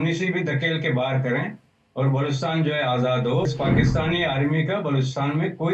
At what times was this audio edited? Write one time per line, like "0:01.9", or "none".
0:03.5